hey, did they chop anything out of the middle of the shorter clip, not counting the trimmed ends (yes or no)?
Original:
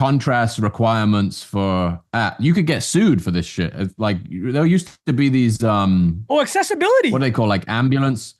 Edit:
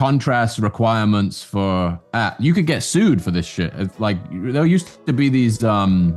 no